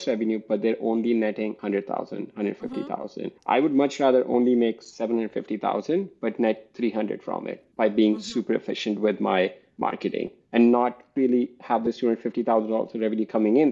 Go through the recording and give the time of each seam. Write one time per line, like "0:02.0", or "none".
0:01.6